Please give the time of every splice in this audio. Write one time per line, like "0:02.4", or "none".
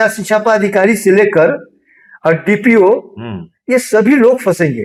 none